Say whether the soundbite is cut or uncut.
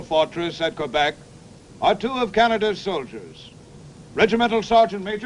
uncut